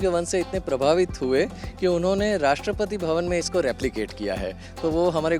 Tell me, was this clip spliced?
no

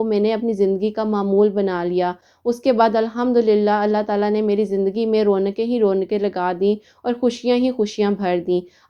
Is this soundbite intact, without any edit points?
yes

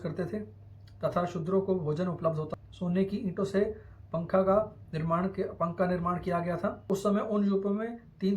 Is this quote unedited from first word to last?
no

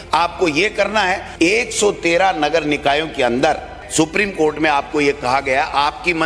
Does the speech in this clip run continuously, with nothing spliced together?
no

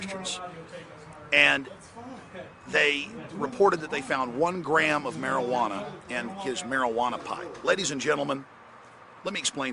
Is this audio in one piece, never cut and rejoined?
no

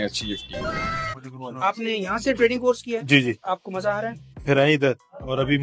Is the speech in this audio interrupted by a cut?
yes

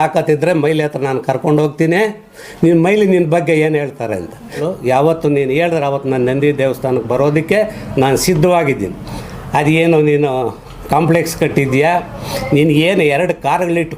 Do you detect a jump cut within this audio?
yes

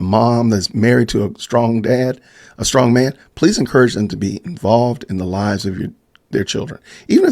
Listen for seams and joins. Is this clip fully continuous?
yes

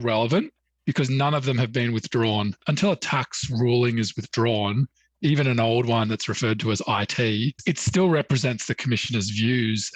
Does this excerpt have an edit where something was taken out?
yes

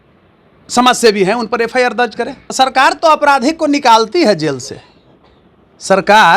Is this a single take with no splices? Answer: no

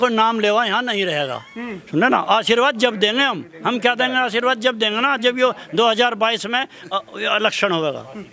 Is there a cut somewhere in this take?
no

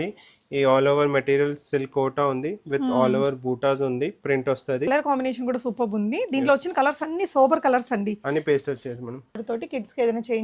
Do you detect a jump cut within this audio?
yes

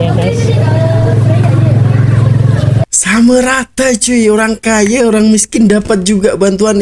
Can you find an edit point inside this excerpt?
no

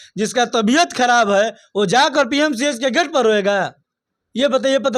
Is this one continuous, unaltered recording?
yes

